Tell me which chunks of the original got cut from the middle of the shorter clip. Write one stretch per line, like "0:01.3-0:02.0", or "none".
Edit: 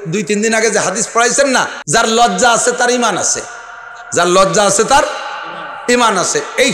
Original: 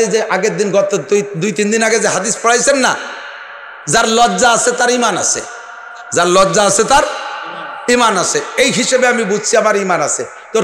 0:03.0-0:03.8